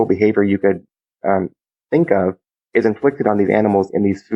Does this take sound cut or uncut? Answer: uncut